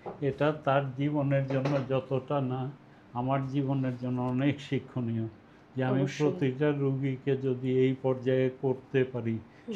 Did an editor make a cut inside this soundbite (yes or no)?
no